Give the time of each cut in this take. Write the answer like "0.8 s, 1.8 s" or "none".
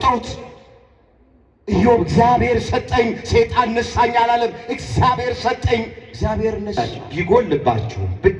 6.8 s

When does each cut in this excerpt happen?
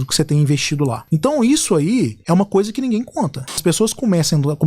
1.0 s, 2.2 s, 3.6 s

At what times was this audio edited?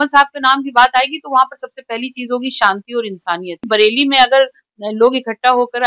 3.6 s

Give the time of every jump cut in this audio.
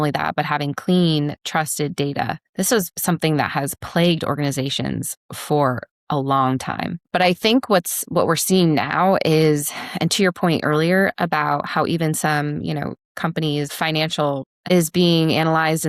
14.6 s

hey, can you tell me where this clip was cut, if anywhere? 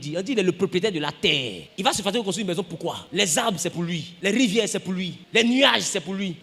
none

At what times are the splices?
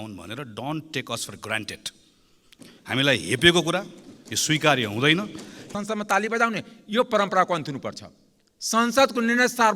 5.7 s

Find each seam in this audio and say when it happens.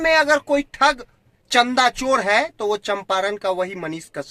none

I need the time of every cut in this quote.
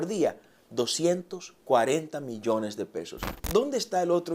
3.4 s

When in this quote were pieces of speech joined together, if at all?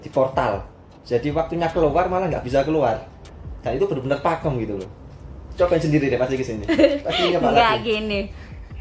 none

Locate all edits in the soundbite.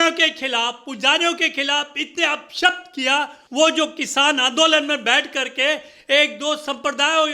3.4 s

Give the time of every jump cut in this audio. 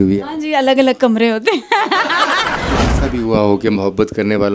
2.6 s

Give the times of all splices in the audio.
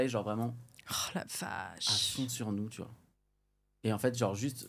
none

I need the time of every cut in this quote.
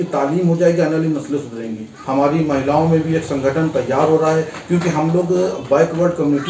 1.9 s

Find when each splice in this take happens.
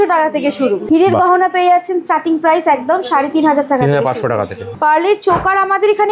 4.7 s

